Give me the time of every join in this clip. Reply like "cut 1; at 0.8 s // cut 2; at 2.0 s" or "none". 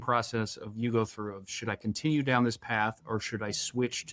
none